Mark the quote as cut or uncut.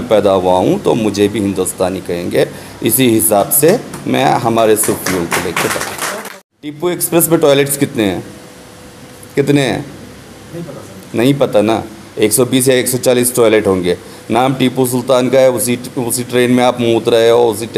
cut